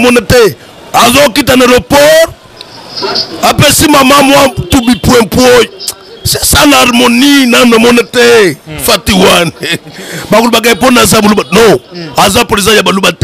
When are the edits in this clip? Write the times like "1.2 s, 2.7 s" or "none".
none